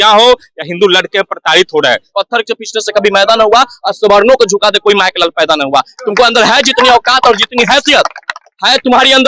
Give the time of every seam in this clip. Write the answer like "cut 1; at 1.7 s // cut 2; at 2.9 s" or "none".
cut 1; at 2.1 s